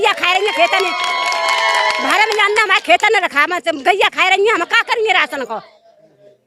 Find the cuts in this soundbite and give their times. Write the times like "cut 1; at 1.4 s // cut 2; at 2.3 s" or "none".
none